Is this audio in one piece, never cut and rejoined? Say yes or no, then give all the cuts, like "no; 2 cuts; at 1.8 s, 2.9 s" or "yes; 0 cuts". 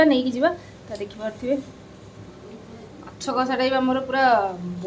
yes; 0 cuts